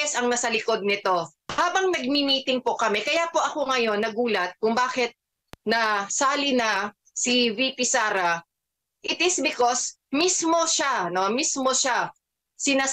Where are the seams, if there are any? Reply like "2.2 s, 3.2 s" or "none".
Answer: 1.4 s